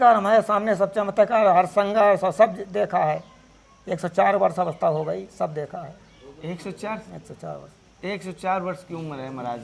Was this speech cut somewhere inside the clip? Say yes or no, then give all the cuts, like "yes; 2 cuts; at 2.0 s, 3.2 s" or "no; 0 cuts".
no; 0 cuts